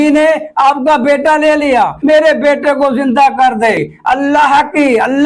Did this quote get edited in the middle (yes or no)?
yes